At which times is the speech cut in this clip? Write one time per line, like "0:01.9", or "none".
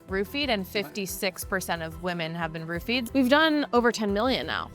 0:03.0
0:03.7